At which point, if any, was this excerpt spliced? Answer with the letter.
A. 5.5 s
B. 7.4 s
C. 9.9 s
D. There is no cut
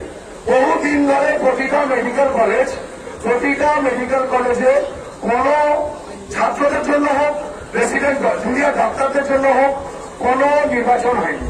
D